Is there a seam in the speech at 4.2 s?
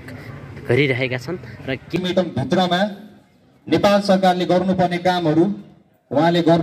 no; 1 cut; at 2.0 s

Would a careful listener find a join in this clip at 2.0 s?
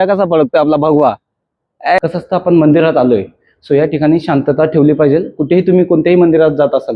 yes; 1 cut; at 2.0 s

